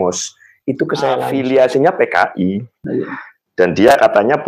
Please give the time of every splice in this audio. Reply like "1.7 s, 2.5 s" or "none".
1.3 s